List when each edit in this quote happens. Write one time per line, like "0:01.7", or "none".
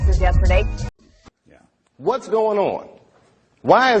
0:01.0

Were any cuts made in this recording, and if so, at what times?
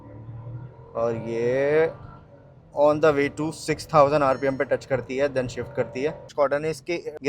0:06.3

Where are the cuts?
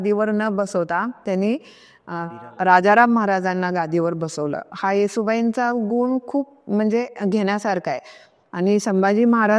none

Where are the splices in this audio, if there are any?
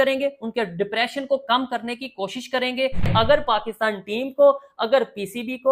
0:03.1

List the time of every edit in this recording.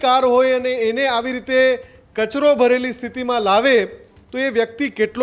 none

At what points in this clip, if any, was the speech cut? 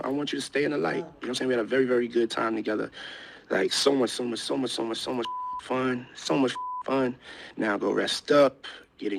none

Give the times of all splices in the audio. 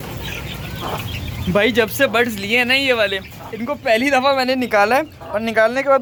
none

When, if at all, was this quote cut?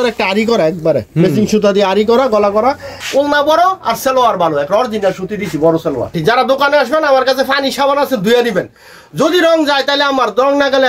0:02.9
0:06.1

